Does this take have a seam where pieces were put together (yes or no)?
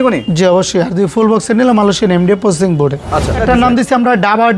yes